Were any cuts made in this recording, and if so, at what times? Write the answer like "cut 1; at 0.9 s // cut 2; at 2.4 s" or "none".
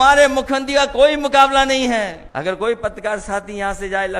cut 1; at 2.2 s